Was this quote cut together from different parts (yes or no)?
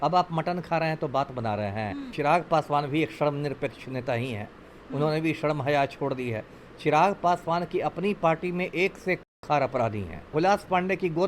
yes